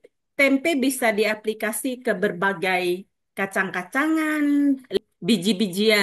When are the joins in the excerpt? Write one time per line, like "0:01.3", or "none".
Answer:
0:05.0